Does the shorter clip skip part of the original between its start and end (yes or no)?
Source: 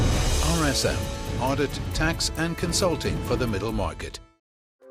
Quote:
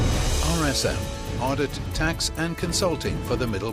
no